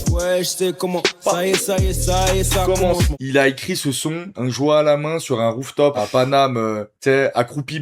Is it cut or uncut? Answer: cut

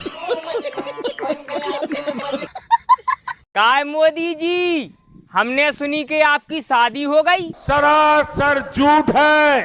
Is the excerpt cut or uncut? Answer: cut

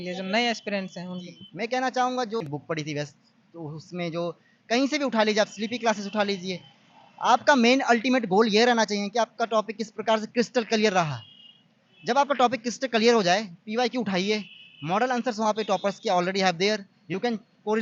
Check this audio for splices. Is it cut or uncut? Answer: uncut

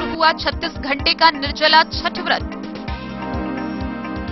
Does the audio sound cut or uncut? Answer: uncut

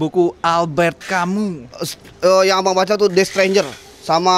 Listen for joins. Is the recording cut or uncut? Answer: uncut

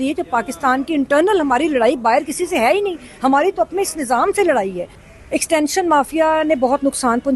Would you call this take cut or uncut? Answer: cut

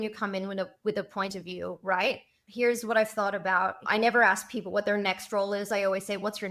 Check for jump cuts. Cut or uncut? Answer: cut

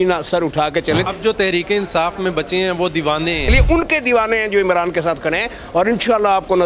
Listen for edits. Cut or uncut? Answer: cut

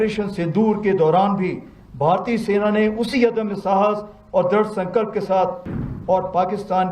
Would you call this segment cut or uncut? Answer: cut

